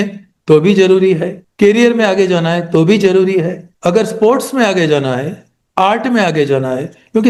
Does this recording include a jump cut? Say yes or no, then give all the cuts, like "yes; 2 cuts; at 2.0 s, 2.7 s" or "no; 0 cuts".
no; 0 cuts